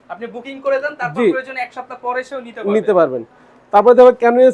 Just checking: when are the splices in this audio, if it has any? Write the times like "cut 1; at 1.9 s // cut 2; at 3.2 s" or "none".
none